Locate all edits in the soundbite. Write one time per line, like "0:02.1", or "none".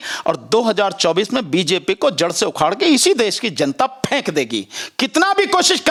none